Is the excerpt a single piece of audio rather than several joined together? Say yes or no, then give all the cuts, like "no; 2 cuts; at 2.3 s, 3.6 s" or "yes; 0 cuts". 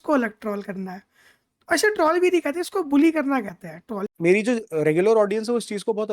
no; 1 cut; at 4.0 s